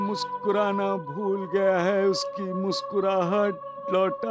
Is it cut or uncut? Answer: uncut